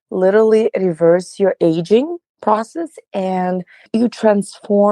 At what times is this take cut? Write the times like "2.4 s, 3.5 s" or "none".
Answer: 2.3 s, 3.9 s